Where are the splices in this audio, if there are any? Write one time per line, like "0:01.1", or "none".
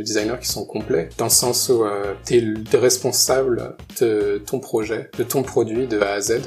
0:05.1